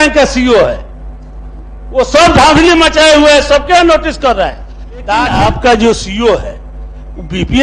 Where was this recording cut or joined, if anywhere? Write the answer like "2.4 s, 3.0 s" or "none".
5.3 s